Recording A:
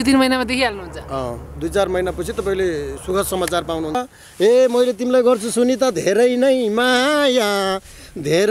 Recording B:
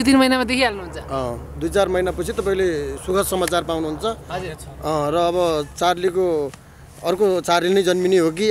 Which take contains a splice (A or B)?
A